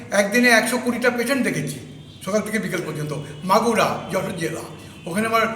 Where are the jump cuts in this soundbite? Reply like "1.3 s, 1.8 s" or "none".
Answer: none